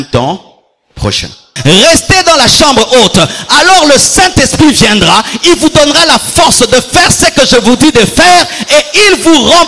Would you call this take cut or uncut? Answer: cut